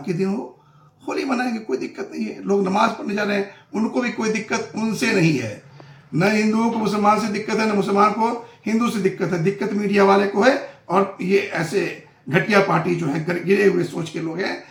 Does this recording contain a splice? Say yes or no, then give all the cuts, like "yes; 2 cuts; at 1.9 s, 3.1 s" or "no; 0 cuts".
no; 0 cuts